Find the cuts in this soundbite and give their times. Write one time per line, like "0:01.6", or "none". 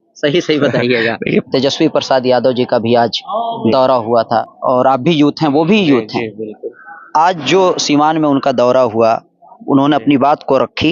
0:01.5
0:04.5